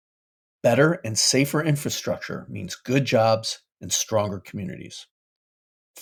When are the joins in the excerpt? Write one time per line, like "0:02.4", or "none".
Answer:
none